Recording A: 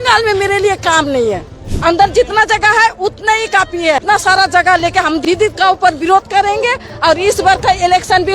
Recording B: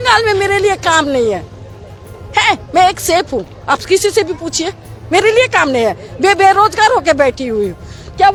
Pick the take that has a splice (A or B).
A